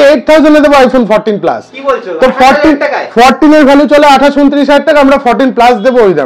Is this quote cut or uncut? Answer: uncut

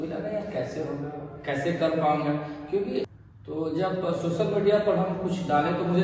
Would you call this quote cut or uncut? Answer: cut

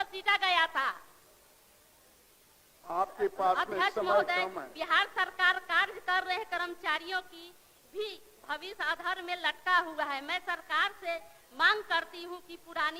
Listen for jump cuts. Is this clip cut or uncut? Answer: uncut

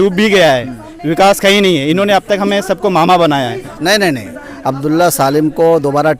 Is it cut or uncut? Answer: cut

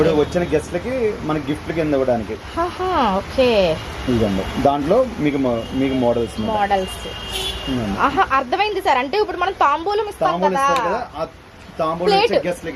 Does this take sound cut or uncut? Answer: uncut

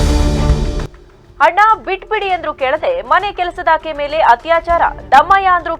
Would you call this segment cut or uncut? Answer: uncut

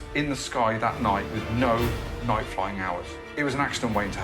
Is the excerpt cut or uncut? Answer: cut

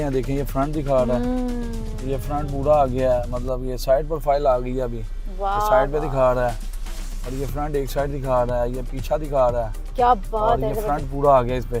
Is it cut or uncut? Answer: uncut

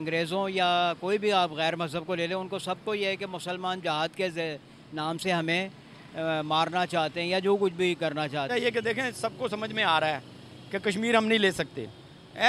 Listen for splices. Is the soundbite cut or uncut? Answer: cut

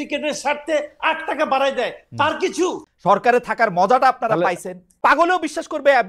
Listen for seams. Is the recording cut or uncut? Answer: cut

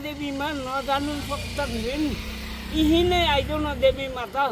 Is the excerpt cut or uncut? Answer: uncut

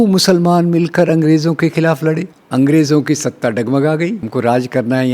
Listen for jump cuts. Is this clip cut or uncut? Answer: cut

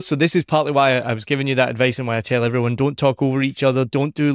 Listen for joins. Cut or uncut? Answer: uncut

